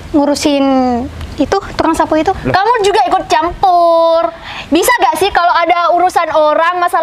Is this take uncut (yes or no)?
yes